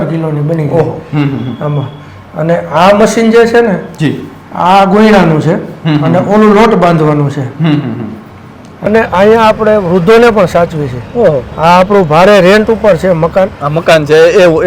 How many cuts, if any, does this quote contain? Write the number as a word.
one